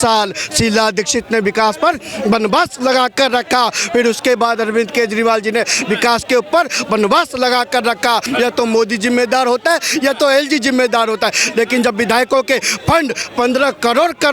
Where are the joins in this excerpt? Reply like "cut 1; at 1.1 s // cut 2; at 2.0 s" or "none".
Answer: cut 1; at 8.3 s // cut 2; at 13.2 s